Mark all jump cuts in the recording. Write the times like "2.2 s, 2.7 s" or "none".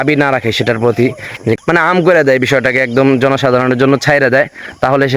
1.6 s